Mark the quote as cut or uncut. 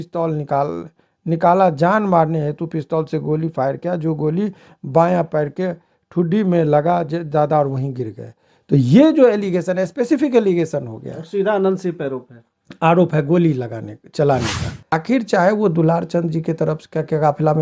cut